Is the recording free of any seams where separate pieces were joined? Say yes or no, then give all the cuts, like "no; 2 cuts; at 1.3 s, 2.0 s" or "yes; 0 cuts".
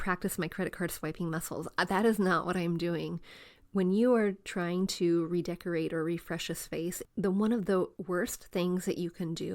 no; 2 cuts; at 7.0 s, 8.0 s